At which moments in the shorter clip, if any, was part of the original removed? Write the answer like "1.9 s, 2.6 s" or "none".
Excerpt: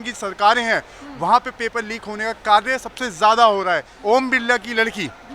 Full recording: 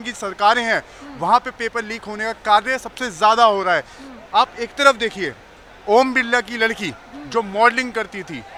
3.9 s